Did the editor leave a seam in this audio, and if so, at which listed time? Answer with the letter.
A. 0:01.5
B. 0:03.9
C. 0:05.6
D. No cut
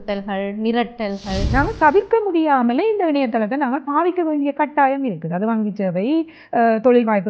A